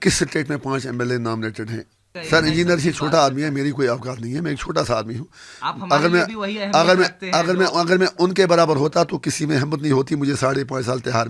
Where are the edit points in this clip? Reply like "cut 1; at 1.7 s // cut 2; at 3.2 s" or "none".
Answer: cut 1; at 2.1 s